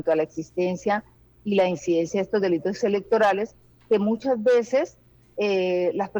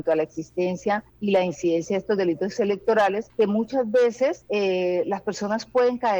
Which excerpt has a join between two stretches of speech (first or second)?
second